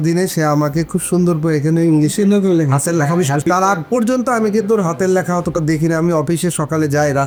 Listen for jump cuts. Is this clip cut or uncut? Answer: uncut